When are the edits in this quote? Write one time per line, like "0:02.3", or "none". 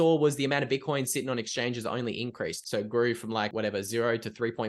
0:02.6
0:03.5